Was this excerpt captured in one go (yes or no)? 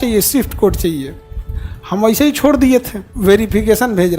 no